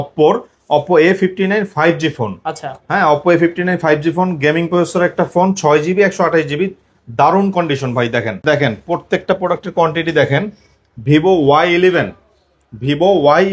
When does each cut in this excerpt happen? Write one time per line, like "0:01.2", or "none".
0:08.4